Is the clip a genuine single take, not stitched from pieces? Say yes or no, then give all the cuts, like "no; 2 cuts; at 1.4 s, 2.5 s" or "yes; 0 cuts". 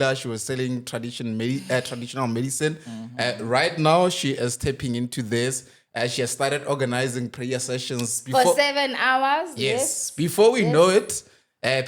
yes; 0 cuts